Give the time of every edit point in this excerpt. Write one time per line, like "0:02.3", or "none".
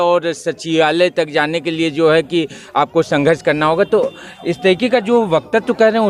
none